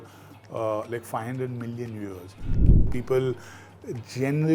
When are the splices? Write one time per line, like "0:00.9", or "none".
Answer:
0:02.6